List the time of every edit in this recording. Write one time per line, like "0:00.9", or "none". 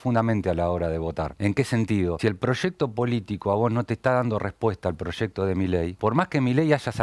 0:01.3
0:02.2
0:05.9